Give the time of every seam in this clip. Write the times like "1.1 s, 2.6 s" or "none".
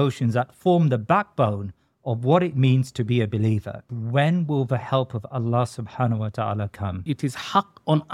3.9 s, 7.0 s

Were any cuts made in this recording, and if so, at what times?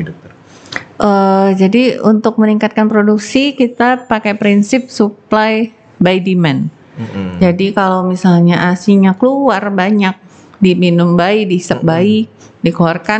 none

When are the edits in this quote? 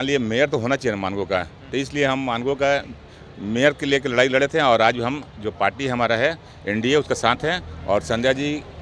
none

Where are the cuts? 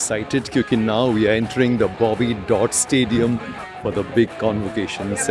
none

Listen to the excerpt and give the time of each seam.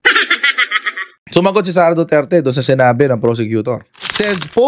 none

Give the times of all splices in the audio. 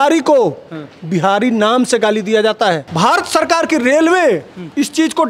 2.9 s

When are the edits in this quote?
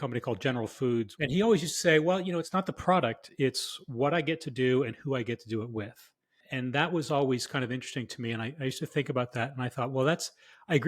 1.1 s, 2.5 s

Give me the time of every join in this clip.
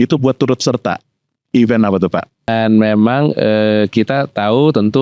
2.5 s

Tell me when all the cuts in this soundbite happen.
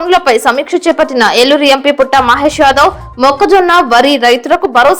none

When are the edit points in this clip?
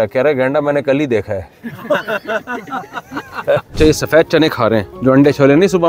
3.7 s, 4.9 s

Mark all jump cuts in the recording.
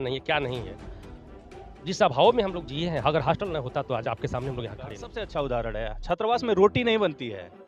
5.0 s

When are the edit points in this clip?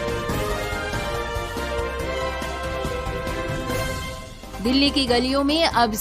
4.5 s

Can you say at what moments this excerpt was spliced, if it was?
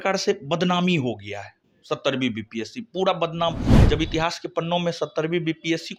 none

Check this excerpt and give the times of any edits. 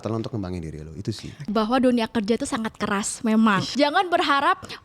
1.4 s, 3.7 s

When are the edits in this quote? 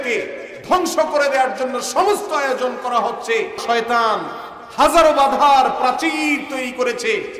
3.6 s

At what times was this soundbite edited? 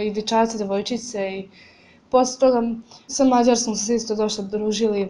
3.1 s

